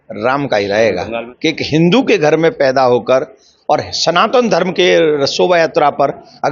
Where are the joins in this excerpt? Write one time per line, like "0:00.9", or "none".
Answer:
0:01.2